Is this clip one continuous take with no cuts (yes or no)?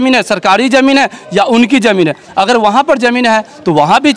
yes